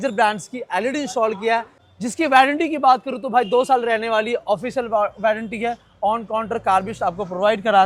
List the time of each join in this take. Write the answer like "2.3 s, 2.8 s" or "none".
none